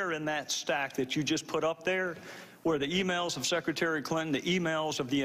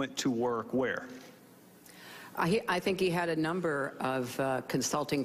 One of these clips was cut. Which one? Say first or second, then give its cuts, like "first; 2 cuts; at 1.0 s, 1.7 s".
first; 1 cut; at 2.5 s